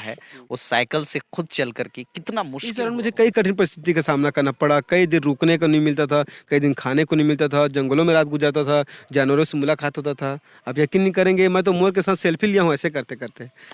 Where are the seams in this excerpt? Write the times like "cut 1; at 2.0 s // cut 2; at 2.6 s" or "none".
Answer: cut 1; at 2.8 s